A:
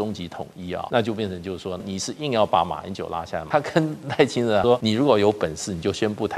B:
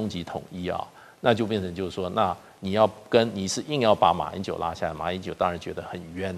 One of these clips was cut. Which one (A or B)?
A